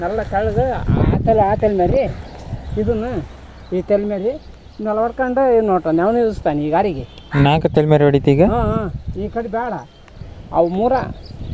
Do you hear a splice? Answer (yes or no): no